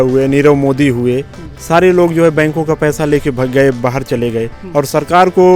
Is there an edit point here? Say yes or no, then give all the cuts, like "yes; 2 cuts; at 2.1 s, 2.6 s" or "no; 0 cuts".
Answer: no; 0 cuts